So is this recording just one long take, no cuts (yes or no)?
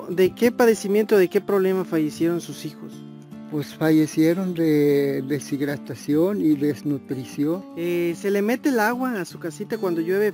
no